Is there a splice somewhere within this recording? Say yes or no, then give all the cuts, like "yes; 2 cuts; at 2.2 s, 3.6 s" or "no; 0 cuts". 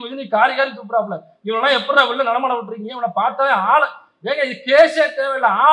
no; 0 cuts